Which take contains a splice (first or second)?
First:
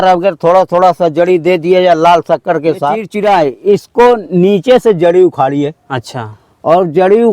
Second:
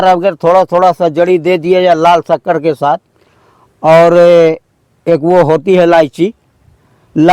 first